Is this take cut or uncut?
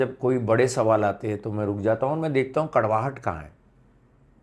uncut